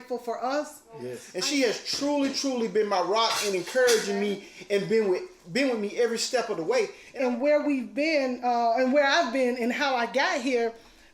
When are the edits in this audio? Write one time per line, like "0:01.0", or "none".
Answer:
0:01.2
0:07.0

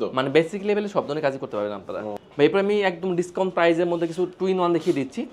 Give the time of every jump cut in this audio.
none

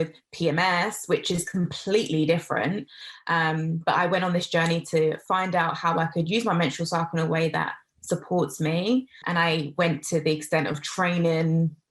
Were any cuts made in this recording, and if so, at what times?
0:05.2
0:09.2

